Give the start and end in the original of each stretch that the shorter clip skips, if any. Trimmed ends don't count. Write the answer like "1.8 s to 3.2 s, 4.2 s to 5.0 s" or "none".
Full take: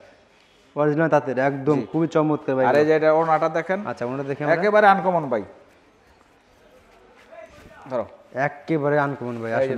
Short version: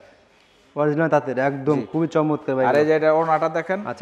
none